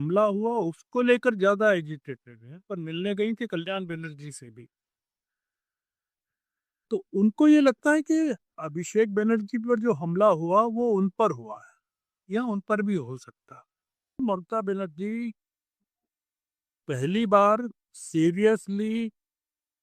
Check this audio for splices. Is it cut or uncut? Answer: cut